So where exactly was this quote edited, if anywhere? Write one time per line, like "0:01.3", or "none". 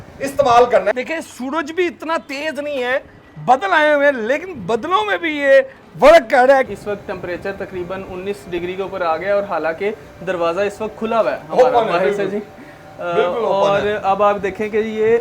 0:00.9
0:06.7